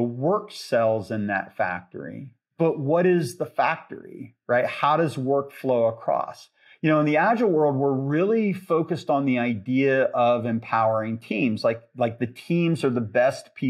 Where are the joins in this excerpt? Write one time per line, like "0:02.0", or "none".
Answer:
0:02.4